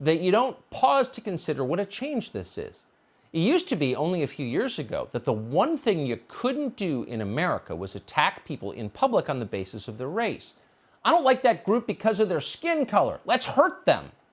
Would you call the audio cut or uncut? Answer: uncut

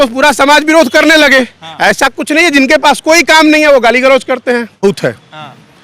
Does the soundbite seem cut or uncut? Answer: cut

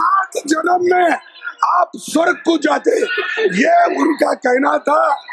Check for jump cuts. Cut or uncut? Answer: uncut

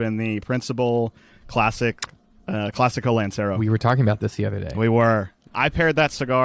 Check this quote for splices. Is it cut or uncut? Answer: cut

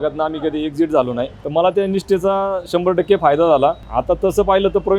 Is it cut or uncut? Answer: cut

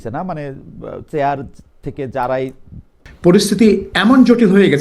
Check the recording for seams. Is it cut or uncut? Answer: cut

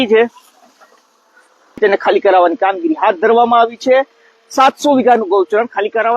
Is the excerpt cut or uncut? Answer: cut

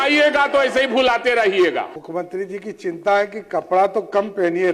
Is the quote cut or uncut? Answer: cut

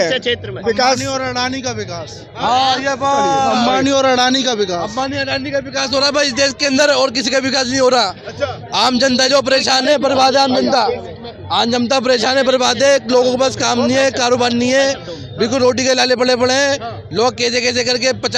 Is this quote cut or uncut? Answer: uncut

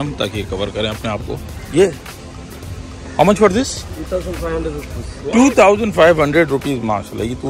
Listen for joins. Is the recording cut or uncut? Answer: uncut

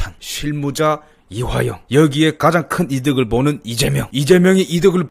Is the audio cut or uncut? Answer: uncut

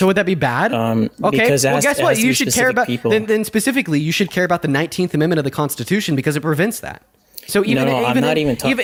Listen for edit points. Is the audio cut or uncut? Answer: uncut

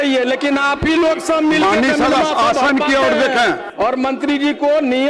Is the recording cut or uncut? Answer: cut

